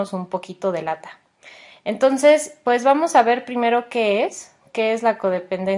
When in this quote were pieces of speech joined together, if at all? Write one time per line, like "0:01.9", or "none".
0:02.8

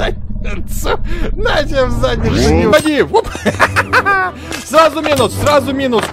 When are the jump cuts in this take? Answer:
0:02.7

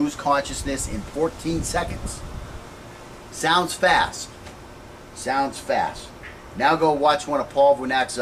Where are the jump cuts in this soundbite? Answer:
none

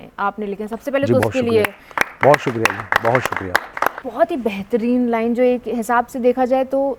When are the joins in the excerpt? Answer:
0:04.0

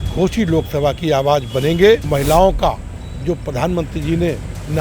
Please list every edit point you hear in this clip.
0:02.1

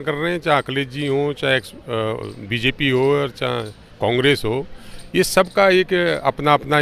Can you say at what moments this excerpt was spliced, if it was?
none

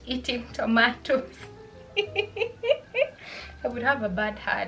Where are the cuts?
none

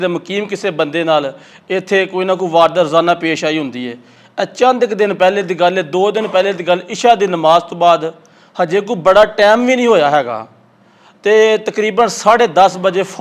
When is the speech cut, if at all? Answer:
none

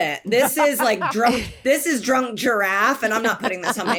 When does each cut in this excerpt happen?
none

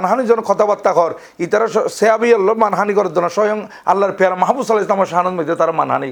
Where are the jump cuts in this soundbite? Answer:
none

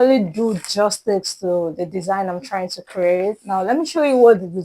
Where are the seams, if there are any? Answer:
none

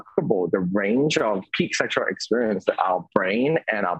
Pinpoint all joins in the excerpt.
0:01.5

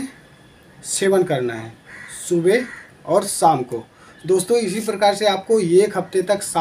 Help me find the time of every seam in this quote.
none

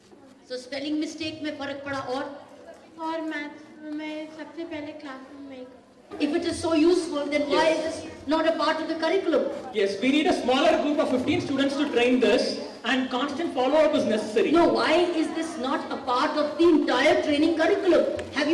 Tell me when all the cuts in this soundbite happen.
0:06.1

